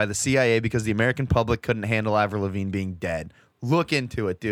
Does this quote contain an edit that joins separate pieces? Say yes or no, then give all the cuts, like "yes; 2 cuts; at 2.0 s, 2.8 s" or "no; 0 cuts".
no; 0 cuts